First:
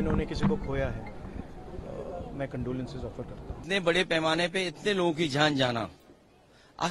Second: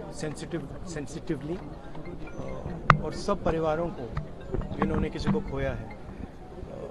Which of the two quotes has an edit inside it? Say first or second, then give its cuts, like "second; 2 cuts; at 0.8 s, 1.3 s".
first; 1 cut; at 3.6 s